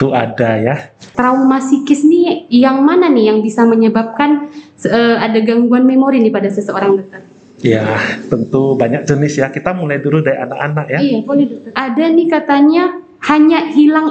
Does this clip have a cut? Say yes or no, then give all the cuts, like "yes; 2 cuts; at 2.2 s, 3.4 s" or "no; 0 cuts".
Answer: yes; 2 cuts; at 1.0 s, 11.8 s